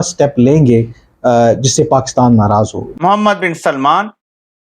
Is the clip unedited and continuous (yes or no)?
no